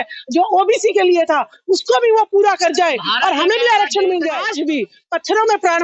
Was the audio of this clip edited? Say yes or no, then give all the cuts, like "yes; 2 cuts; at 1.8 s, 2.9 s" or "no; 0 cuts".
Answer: yes; 1 cut; at 4.5 s